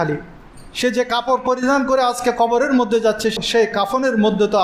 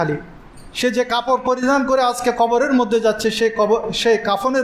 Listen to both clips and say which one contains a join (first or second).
first